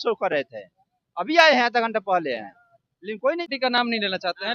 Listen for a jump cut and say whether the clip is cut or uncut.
cut